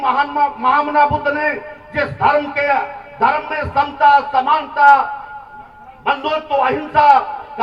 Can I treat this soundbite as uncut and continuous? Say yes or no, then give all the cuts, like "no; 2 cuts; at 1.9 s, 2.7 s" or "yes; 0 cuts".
yes; 0 cuts